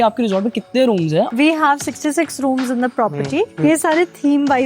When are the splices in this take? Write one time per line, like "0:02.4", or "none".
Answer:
0:01.3
0:03.5